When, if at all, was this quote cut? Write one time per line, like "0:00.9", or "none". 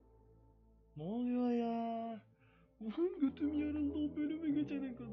none